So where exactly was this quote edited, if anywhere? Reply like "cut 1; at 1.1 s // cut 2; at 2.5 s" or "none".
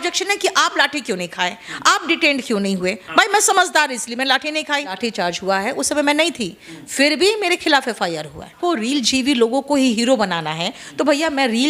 cut 1; at 5.0 s // cut 2; at 8.5 s